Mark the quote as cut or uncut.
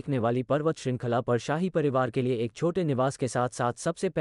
uncut